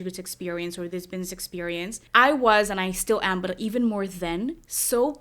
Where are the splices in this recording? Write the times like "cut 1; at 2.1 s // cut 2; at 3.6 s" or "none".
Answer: cut 1; at 2.0 s